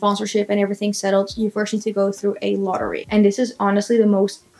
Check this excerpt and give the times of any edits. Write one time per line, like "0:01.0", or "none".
0:02.7